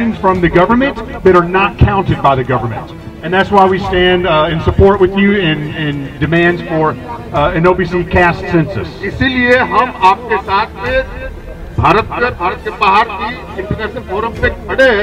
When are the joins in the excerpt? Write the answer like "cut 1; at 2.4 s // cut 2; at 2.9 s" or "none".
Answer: cut 1; at 3.1 s